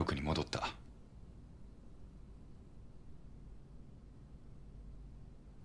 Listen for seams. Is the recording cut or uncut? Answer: uncut